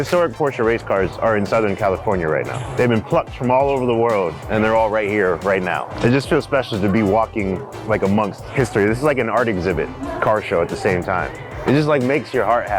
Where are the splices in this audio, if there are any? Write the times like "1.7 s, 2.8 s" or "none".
2.6 s, 4.4 s, 5.9 s, 8.4 s, 10.0 s, 11.4 s